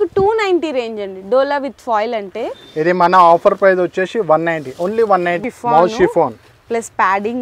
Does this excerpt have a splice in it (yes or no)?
yes